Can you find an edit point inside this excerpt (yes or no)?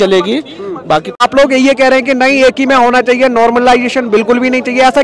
yes